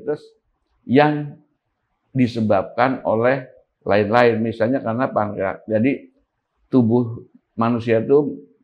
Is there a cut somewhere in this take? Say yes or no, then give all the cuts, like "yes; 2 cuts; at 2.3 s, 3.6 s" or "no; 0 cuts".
no; 0 cuts